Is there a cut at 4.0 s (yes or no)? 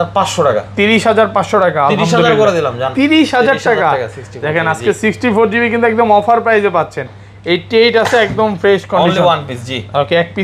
no